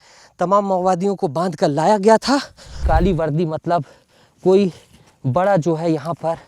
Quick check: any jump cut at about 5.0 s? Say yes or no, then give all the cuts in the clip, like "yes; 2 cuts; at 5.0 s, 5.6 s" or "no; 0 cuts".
no; 1 cut; at 2.8 s